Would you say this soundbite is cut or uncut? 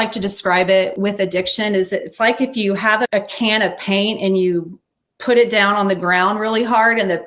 cut